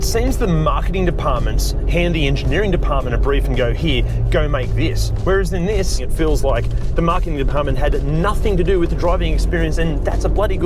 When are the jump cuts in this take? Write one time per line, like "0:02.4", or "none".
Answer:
0:06.1
0:09.8